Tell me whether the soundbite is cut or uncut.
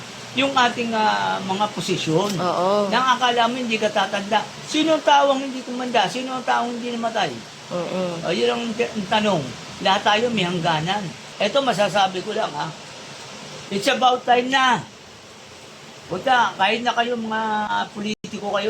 cut